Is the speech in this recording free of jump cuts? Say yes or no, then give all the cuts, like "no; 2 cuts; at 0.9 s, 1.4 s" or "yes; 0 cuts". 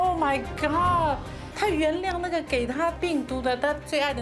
no; 1 cut; at 3.0 s